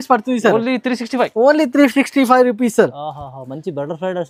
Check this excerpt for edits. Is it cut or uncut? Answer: uncut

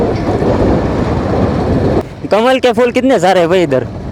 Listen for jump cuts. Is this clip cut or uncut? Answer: cut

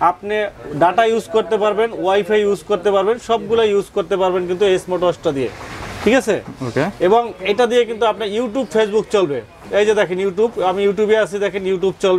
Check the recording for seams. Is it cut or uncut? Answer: uncut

